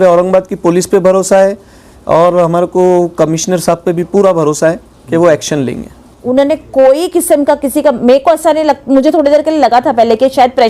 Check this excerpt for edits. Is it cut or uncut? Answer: cut